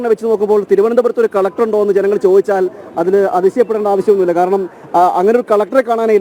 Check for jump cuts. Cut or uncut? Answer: uncut